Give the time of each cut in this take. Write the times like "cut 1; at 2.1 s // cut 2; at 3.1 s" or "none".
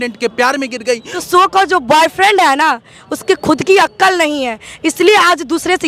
cut 1; at 1.1 s